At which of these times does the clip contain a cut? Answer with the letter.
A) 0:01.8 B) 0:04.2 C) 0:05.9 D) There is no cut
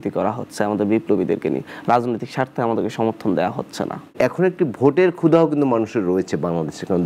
B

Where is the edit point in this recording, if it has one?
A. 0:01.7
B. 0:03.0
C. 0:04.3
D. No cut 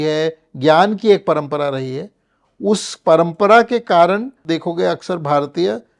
C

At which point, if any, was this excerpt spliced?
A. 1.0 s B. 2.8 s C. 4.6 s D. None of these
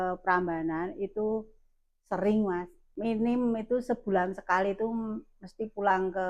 B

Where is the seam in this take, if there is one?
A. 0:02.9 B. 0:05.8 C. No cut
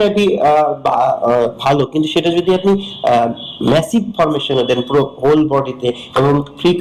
C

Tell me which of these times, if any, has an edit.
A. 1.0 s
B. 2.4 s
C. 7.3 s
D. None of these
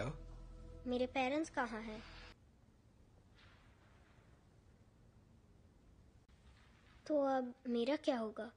B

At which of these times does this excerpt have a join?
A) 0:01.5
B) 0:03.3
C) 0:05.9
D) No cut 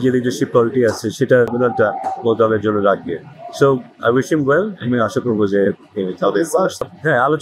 A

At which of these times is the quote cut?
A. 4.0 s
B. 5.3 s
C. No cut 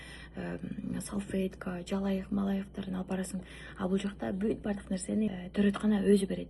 B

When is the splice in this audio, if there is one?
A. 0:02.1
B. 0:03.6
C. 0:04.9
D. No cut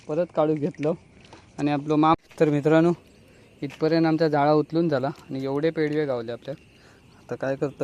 A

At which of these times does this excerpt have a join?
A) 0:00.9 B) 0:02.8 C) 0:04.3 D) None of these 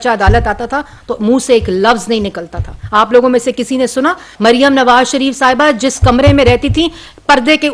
C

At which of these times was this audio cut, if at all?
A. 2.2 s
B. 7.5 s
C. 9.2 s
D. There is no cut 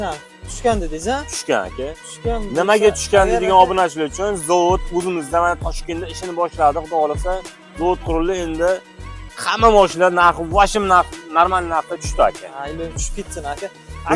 D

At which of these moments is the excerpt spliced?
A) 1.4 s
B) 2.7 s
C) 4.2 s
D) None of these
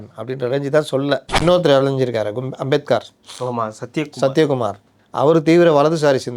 A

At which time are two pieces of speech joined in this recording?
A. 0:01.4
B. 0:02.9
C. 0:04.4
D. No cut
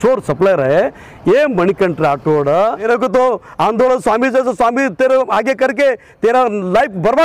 B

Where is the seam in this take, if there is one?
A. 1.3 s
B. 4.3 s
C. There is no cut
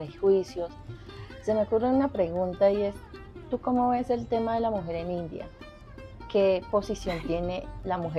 C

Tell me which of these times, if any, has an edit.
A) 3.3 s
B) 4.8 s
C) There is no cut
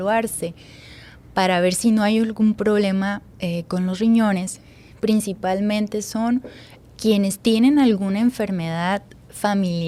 C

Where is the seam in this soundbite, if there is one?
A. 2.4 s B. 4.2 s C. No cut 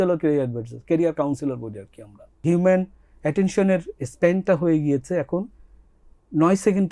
A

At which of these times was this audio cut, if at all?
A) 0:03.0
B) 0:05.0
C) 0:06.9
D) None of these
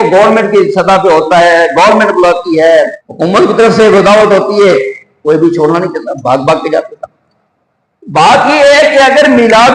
A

